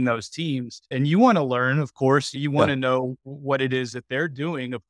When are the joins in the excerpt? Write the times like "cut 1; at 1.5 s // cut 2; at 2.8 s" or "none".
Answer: cut 1; at 0.9 s // cut 2; at 2.4 s

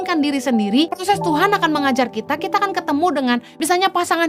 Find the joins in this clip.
cut 1; at 1.0 s

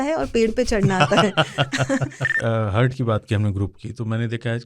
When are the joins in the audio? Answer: cut 1; at 2.4 s

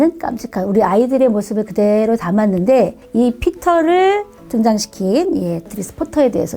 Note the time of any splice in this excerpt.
cut 1; at 3.0 s // cut 2; at 5.7 s

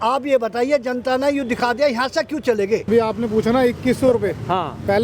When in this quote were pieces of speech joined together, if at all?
cut 1; at 2.9 s

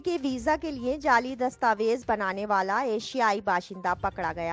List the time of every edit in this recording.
none

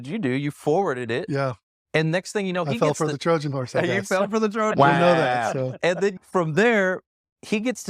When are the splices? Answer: cut 1; at 6.2 s

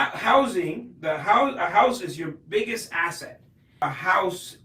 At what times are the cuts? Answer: cut 1; at 3.7 s

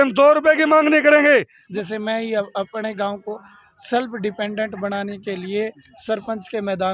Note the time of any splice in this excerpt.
cut 1; at 1.6 s

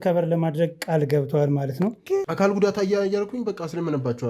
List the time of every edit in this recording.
cut 1; at 2.1 s

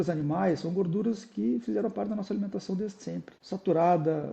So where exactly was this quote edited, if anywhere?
cut 1; at 3.3 s

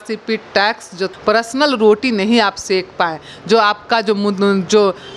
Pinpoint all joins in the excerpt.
cut 1; at 1.1 s

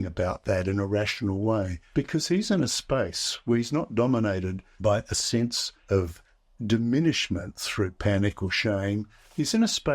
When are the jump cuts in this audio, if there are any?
cut 1; at 1.8 s // cut 2; at 4.6 s // cut 3; at 5.7 s

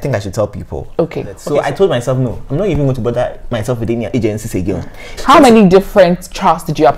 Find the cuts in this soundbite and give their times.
cut 1; at 1.4 s // cut 2; at 5.1 s

